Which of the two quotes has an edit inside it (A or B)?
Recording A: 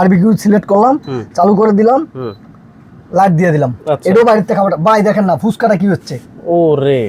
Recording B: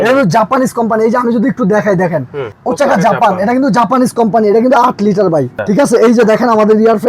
B